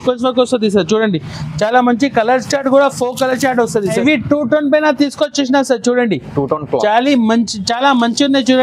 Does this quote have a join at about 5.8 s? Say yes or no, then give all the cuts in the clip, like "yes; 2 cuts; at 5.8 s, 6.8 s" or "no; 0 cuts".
no; 1 cut; at 4.0 s